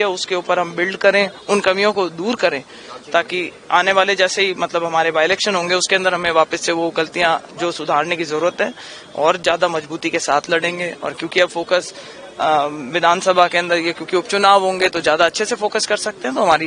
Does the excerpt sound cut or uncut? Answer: uncut